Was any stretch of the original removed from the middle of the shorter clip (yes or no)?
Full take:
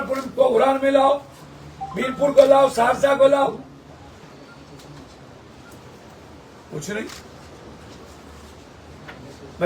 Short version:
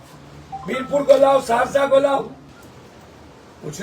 yes